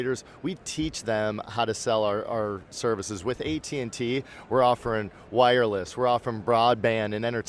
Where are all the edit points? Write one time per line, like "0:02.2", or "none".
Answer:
none

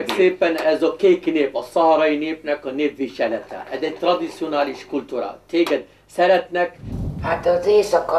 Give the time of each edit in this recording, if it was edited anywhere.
0:06.8

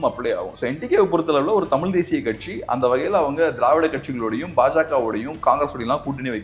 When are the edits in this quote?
none

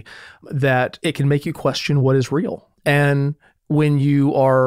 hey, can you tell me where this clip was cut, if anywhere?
0:00.9
0:02.7

